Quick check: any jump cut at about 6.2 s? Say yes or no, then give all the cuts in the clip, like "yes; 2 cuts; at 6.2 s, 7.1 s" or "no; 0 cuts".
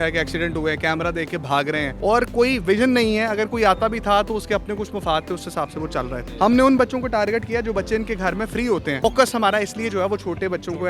yes; 3 cuts; at 1.9 s, 6.2 s, 9.0 s